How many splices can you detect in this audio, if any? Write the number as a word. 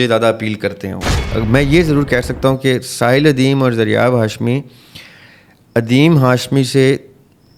one